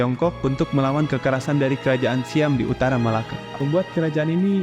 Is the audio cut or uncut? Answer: cut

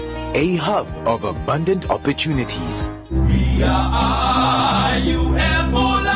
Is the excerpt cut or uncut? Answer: uncut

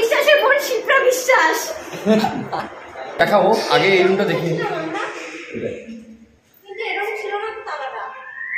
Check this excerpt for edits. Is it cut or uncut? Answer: cut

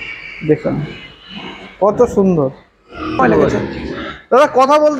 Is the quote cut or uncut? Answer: cut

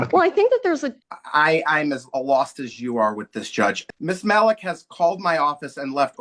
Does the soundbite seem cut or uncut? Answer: cut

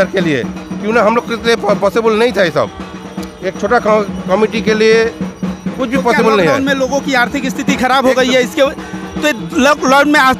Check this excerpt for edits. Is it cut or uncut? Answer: uncut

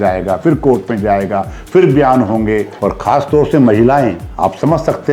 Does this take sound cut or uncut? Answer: cut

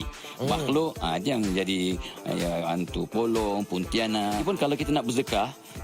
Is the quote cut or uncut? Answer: cut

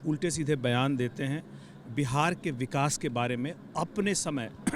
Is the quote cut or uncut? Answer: uncut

